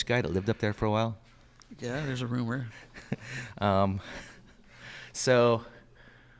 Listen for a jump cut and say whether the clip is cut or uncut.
uncut